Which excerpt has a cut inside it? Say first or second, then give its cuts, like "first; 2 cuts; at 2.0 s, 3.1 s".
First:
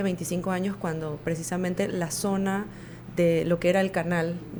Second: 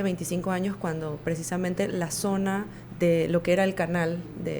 second; 1 cut; at 2.8 s